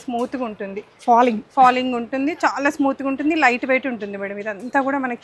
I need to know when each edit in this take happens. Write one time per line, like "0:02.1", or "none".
none